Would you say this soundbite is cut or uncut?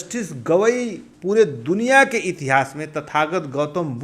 cut